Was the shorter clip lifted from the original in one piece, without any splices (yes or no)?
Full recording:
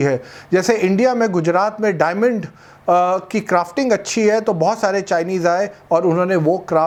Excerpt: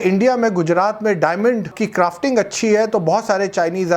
no